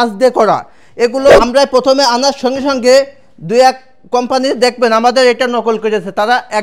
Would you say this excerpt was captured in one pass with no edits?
no; 1 cut; at 1.3 s

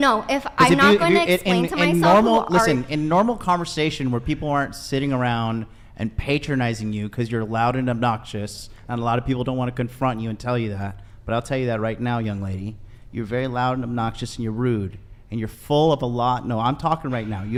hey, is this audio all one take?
yes; 0 cuts

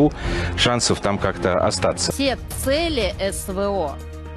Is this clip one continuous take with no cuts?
no; 1 cut; at 2.0 s

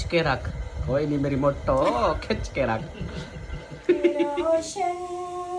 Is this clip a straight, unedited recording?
no; 1 cut; at 4.4 s

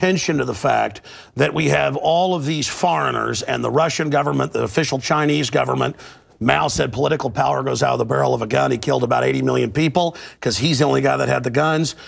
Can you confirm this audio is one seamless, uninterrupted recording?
yes; 0 cuts

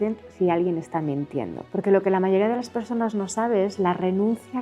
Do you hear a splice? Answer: yes; 1 cut; at 1.6 s

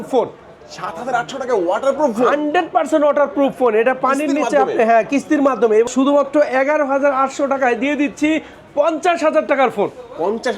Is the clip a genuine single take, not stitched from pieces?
no; 1 cut; at 5.9 s

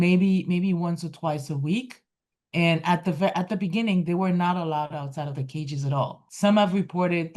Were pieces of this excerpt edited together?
yes; 1 cut; at 6.2 s

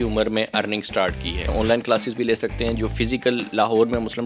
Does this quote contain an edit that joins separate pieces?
yes; 1 cut; at 1.5 s

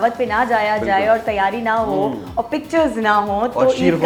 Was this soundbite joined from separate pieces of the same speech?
no; 0 cuts

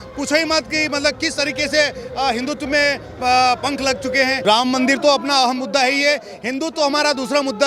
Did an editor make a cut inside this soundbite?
yes; 1 cut; at 4.4 s

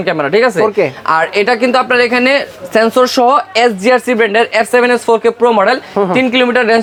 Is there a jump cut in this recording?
no; 0 cuts

